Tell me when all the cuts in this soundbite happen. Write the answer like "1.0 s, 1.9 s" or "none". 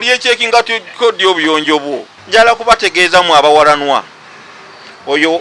2.1 s